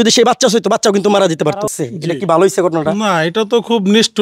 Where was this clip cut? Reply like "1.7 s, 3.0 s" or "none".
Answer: 1.7 s